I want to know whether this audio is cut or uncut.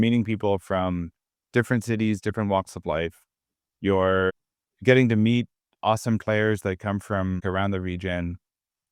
uncut